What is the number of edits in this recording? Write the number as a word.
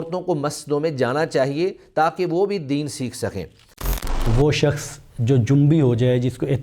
one